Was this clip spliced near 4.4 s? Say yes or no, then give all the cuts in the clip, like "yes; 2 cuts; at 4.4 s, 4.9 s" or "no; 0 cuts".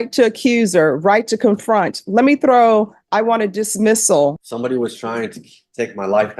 yes; 1 cut; at 4.4 s